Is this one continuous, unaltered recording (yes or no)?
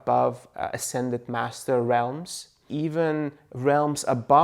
no